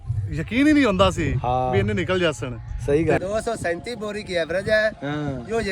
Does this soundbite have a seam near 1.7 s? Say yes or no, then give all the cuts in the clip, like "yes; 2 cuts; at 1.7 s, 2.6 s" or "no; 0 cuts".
no; 1 cut; at 3.2 s